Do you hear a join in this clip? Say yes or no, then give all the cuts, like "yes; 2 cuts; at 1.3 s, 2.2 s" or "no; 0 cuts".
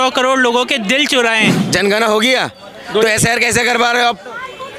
yes; 1 cut; at 1.6 s